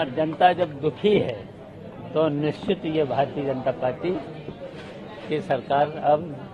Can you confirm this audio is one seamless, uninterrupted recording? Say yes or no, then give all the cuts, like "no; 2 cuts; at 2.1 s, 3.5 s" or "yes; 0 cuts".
yes; 0 cuts